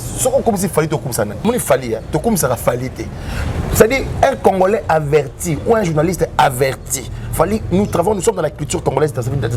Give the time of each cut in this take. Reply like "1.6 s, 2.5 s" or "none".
none

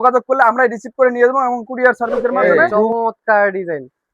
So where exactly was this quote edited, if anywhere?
2.3 s

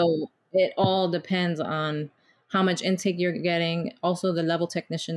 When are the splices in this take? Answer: none

